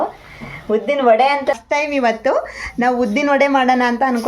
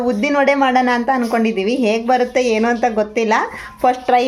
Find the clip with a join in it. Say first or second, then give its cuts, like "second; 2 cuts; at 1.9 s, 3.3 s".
first; 1 cut; at 1.6 s